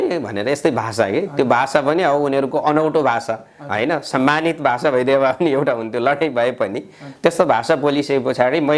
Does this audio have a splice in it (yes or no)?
no